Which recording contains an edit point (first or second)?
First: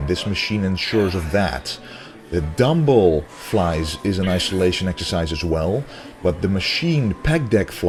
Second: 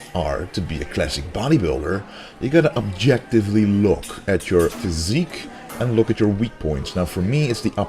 second